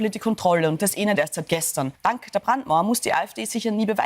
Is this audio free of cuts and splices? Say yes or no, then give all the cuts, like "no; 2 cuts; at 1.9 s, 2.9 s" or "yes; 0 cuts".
no; 1 cut; at 1.9 s